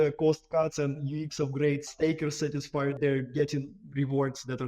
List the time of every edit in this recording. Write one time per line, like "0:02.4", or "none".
0:01.9
0:03.0